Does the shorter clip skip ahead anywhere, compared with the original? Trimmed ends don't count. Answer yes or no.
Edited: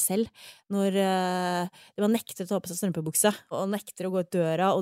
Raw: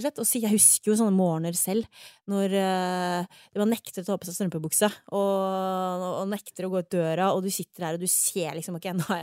yes